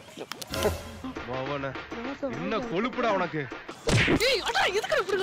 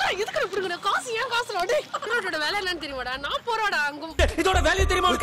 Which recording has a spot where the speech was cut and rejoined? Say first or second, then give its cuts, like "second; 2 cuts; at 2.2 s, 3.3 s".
second; 2 cuts; at 2.0 s, 4.0 s